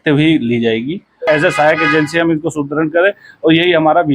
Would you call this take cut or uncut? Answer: cut